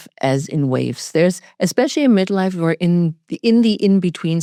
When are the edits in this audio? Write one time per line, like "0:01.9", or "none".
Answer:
none